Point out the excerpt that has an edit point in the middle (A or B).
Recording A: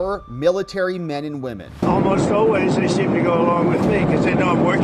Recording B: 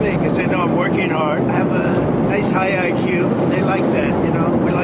A